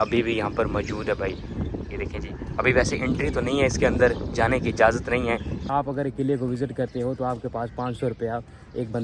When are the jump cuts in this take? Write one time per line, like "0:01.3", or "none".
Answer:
0:05.7